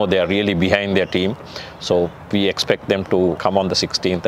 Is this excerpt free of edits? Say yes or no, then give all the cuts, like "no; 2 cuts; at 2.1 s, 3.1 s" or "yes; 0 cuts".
no; 1 cut; at 3.4 s